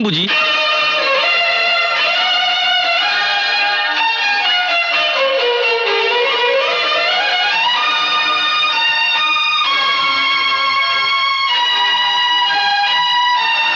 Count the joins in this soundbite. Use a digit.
0